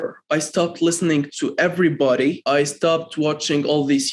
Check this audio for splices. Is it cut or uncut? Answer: cut